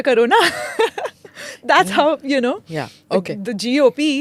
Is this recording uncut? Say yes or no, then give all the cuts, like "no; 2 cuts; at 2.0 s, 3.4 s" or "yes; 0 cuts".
yes; 0 cuts